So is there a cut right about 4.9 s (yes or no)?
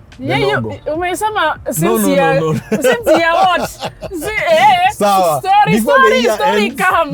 no